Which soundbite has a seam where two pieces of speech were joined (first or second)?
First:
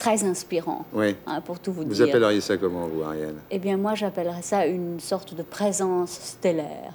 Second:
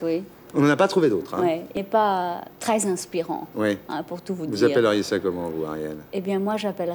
second